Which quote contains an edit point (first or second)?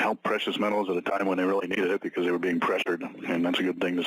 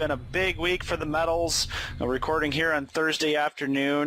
first